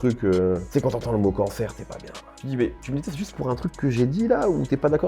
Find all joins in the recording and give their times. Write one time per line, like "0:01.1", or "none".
0:02.3